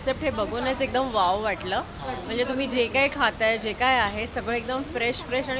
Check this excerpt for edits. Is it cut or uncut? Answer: uncut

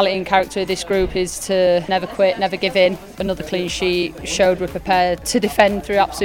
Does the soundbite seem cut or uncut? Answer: cut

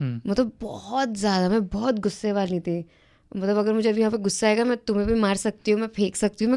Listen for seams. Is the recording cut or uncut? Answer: uncut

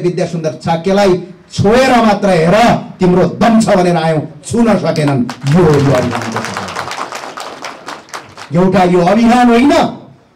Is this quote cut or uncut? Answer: uncut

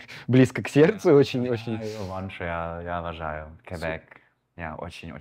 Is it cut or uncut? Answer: uncut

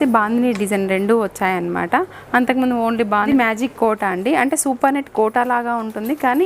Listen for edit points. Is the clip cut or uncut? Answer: cut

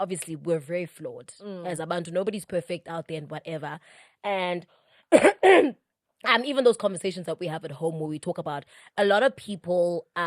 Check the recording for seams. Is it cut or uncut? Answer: uncut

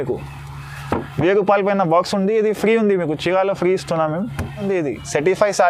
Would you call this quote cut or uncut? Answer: cut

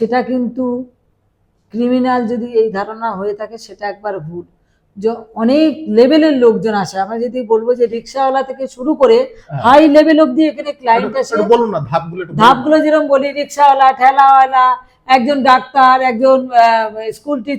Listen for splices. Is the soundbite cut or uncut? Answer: uncut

